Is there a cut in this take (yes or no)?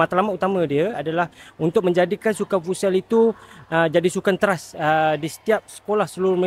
no